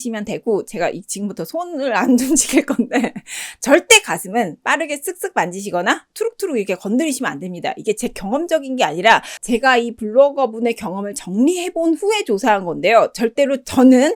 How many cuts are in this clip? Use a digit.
0